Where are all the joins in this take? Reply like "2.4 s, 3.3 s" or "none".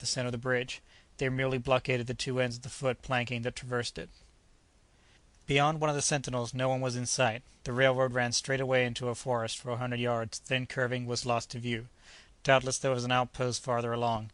4.8 s